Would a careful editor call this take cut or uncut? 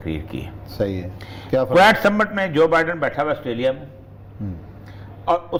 uncut